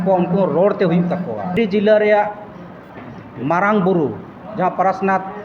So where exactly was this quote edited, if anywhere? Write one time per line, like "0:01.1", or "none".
0:01.5